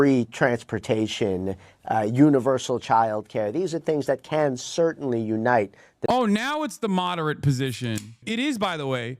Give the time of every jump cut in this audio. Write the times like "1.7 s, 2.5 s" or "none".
8.2 s